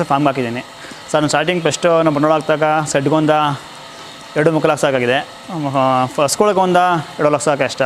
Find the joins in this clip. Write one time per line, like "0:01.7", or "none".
none

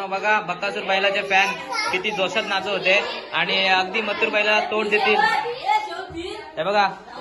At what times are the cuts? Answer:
none

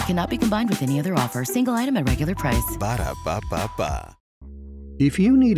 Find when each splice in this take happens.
0:04.4

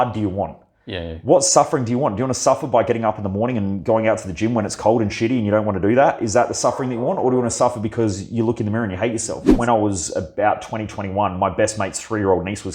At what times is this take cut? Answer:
0:09.5

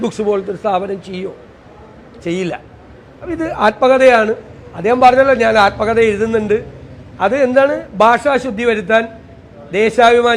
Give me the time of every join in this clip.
none

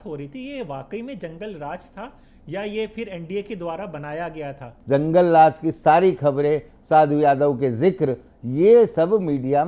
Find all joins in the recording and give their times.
0:04.7

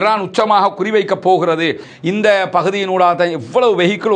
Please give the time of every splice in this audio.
0:01.9

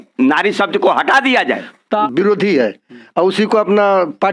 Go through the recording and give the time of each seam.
0:02.0

